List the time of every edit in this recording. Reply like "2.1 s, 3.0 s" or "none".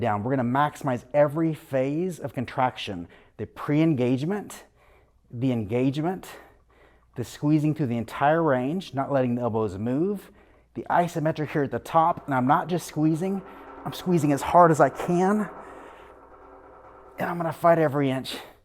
none